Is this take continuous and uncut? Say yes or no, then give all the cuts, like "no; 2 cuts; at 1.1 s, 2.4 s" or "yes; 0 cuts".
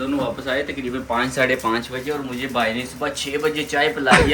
yes; 0 cuts